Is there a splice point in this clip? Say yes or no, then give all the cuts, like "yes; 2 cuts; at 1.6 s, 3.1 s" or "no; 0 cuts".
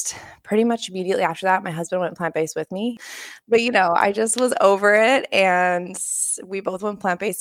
yes; 1 cut; at 3.0 s